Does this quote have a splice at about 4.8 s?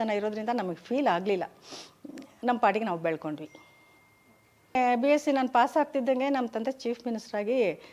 yes; 1 cut; at 4.8 s

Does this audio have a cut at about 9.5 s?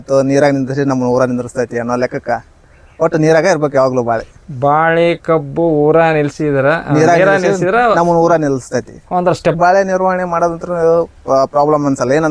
yes; 1 cut; at 9.5 s

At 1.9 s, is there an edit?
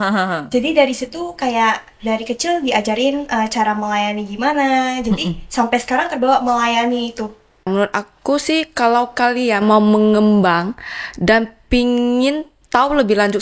no; 1 cut; at 7.7 s

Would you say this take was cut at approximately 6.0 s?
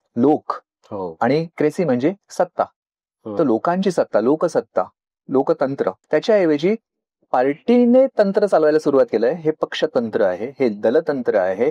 yes; 1 cut; at 6.0 s

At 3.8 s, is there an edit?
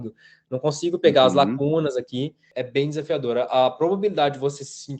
no; 1 cut; at 2.6 s

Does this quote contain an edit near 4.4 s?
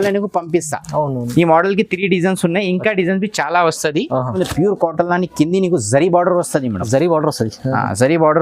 yes; 1 cut; at 4.4 s

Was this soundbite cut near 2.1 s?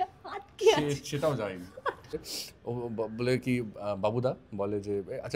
yes; 1 cut; at 2.1 s

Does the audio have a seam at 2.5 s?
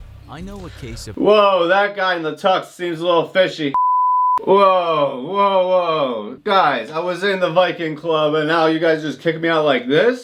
no; 1 cut; at 3.8 s

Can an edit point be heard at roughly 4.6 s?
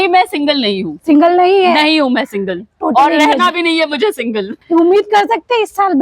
yes; 1 cut; at 4.6 s

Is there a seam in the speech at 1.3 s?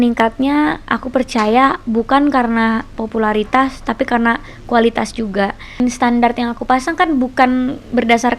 no; 1 cut; at 5.8 s

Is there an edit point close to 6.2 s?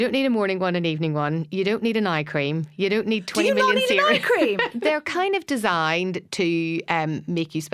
no; 1 cut; at 4.7 s

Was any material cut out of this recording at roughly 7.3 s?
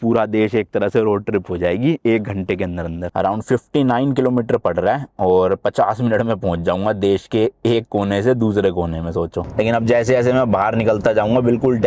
no; 2 cuts; at 2.9 s, 9.4 s

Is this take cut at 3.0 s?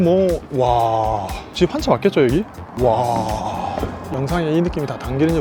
no; 0 cuts

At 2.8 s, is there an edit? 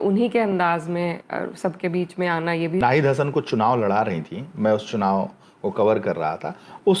yes; 1 cut; at 2.8 s

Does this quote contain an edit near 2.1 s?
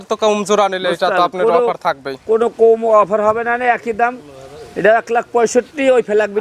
no; 0 cuts

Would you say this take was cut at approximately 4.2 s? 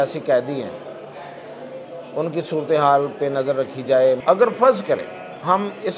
yes; 1 cut; at 4.2 s

